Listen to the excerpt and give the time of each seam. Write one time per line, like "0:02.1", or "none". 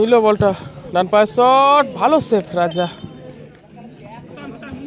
0:03.6